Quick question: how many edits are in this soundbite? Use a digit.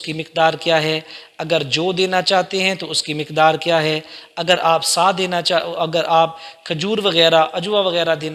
0